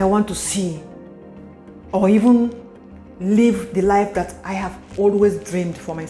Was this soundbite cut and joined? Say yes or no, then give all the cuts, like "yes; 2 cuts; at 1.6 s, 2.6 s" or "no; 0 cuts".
no; 0 cuts